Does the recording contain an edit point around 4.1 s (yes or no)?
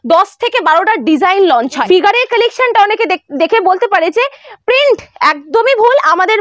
no